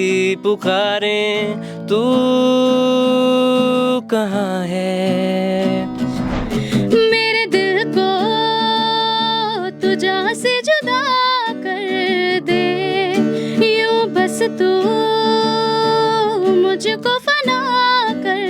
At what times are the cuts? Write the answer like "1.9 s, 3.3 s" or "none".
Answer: 6.2 s